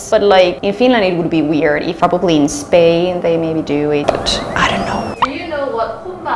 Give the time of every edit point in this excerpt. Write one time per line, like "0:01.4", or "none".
0:01.9